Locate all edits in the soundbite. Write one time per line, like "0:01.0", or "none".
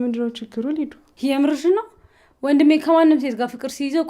0:01.0

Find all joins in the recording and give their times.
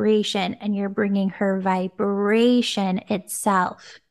none

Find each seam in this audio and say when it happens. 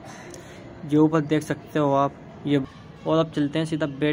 0:02.6

